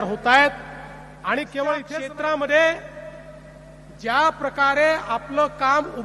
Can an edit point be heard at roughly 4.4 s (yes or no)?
no